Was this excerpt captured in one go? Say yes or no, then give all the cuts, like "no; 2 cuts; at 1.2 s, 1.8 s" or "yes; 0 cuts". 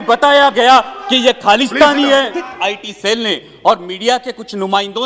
no; 1 cut; at 2.5 s